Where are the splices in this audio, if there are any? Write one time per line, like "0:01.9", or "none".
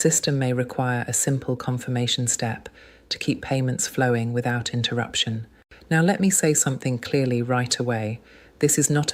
0:03.6